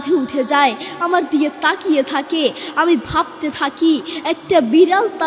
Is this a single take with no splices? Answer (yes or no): yes